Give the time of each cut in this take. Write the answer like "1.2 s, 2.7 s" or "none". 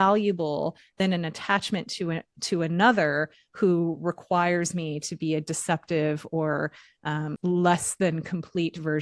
7.3 s